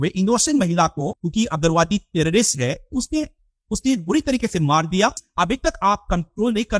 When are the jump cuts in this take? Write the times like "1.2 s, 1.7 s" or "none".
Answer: 1.2 s, 5.2 s